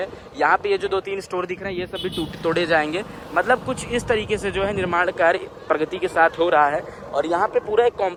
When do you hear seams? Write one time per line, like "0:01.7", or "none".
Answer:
none